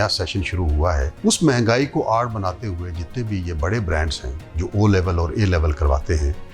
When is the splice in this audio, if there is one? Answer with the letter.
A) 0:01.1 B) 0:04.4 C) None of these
A